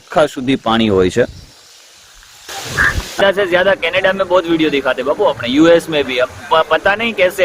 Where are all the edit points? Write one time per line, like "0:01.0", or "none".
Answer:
0:03.2